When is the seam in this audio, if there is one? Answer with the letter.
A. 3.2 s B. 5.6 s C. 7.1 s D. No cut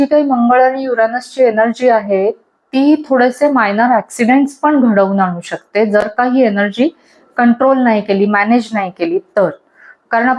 D